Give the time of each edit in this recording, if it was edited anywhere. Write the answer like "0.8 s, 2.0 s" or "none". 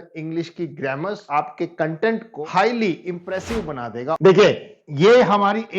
1.2 s, 2.3 s, 4.2 s